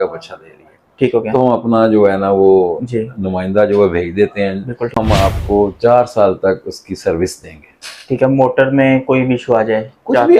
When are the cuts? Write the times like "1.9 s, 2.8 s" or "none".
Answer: 4.9 s